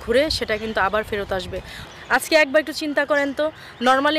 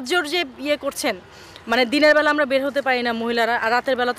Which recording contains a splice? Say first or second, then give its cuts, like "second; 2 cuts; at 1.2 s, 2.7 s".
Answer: first; 1 cut; at 1.8 s